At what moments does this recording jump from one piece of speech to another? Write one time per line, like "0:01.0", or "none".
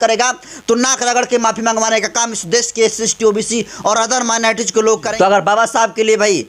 0:05.1